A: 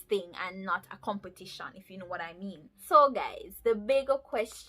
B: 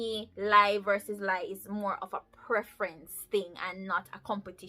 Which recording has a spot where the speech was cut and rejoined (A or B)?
A